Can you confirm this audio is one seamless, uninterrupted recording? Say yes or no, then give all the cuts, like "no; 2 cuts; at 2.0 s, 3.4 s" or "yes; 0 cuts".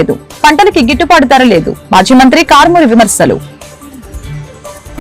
no; 1 cut; at 3.6 s